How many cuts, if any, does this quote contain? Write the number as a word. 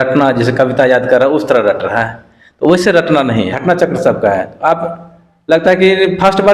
one